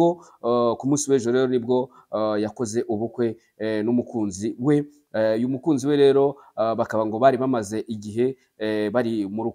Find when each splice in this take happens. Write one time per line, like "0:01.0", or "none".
none